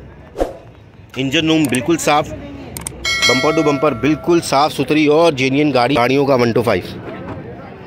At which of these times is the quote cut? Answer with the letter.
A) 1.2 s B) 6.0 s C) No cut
B